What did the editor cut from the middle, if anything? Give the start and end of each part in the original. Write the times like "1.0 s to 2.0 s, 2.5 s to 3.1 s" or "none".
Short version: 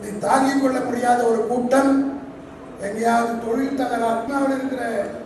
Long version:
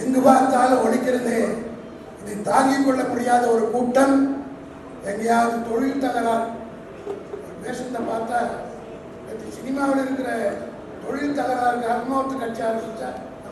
6.5 s to 9.8 s

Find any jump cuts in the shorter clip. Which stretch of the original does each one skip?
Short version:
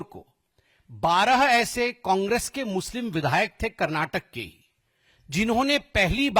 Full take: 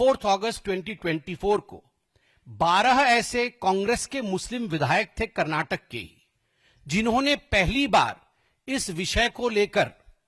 none

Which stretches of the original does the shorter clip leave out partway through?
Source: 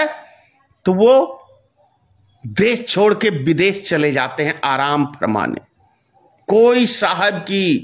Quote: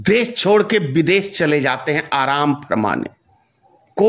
none

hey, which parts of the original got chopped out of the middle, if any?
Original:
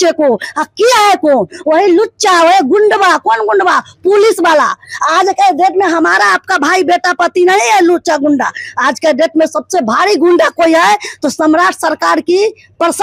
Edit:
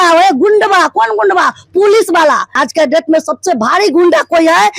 4.8 s to 8.8 s

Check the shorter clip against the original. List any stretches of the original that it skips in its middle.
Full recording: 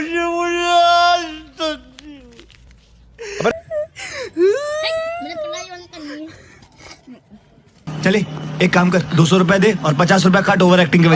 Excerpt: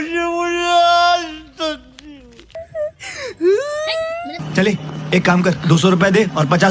2.6 s to 3.6 s, 5.3 s to 7.8 s

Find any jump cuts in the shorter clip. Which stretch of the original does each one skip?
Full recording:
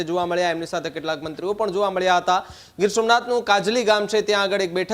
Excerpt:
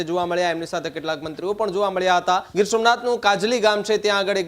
2.5 s to 2.7 s

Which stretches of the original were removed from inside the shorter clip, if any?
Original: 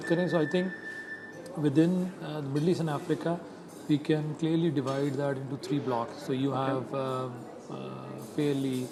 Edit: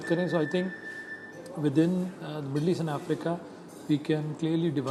none

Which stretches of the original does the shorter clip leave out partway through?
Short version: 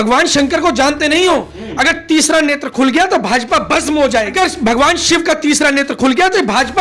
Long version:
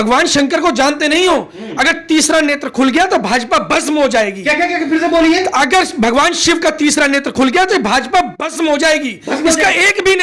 4.3 s to 5.7 s

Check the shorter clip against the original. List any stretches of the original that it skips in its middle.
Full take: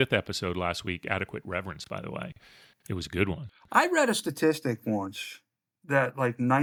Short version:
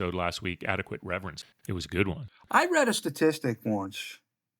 1.8 s to 2.6 s

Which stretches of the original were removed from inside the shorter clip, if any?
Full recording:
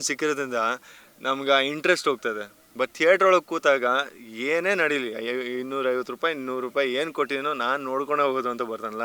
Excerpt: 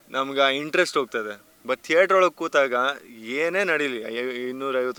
none

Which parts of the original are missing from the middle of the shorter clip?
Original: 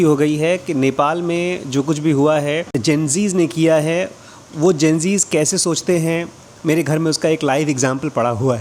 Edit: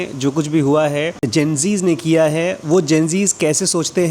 4.1 s to 4.5 s

